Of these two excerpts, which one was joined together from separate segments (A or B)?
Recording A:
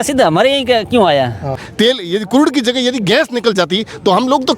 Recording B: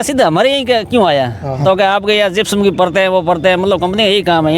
A